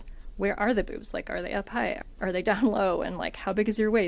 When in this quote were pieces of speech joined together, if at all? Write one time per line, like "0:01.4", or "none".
0:02.0